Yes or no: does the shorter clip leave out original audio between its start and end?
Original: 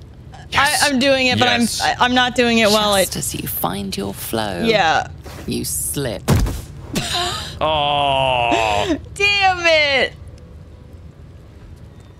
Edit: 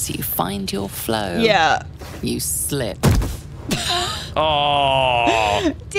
no